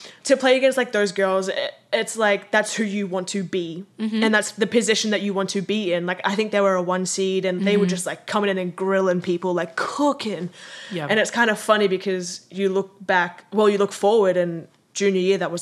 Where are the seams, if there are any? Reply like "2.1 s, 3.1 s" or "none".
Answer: none